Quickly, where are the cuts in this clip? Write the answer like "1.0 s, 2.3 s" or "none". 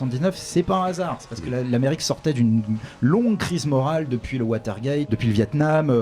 5.1 s